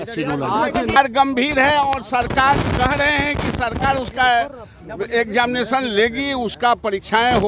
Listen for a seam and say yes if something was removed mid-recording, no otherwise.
yes